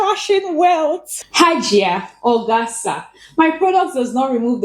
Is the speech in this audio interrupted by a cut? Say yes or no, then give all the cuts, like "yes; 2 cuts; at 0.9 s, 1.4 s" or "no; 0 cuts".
yes; 1 cut; at 1.1 s